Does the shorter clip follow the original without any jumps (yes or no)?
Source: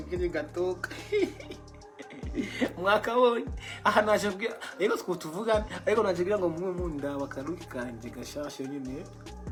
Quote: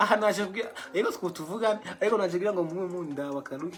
yes